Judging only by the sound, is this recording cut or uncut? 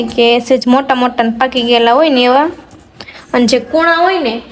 uncut